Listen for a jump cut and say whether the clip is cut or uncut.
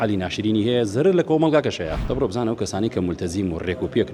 cut